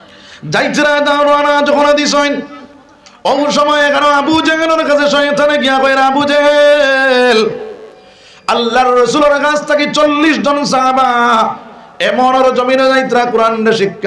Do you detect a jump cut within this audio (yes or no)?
no